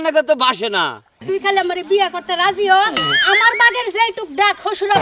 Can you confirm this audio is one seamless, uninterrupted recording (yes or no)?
no